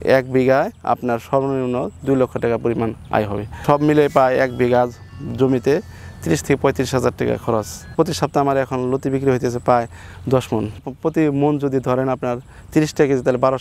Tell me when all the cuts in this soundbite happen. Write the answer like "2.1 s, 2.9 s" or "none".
3.6 s, 8.0 s